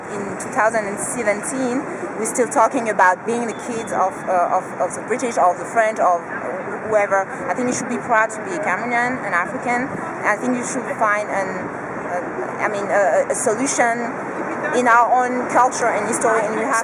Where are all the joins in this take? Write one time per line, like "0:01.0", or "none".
none